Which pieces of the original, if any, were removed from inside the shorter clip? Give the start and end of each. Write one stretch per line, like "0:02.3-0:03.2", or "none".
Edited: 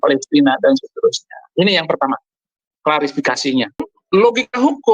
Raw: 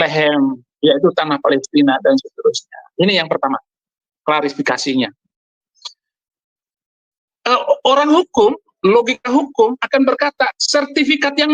0:05.4-0:08.7